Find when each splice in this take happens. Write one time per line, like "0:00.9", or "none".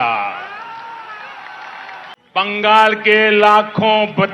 0:02.1